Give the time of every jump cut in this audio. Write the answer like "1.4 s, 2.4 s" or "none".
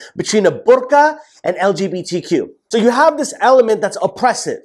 2.6 s